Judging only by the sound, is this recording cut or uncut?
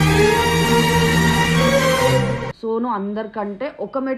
cut